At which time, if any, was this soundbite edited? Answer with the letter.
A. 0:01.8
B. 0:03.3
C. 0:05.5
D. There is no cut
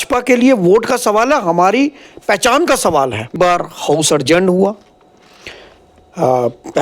B